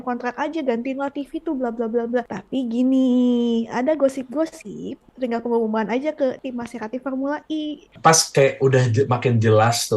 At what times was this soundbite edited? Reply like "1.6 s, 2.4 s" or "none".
2.4 s, 5.0 s, 6.4 s, 7.9 s